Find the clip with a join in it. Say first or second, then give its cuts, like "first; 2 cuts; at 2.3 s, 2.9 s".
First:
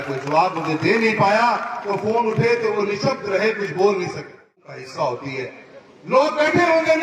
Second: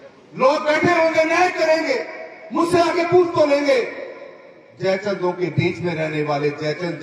first; 1 cut; at 4.8 s